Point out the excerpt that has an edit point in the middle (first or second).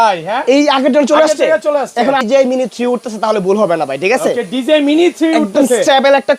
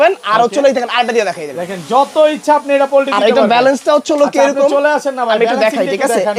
first